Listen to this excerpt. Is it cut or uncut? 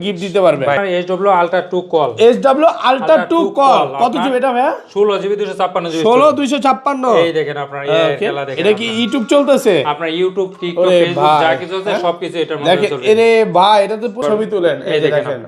cut